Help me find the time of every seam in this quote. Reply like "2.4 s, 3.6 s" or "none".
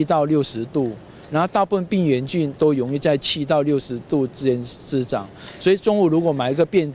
none